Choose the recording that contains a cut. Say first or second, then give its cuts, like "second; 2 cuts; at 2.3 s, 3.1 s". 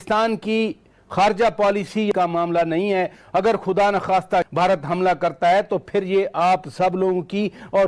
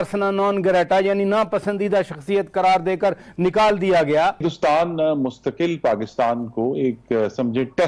second; 1 cut; at 4.5 s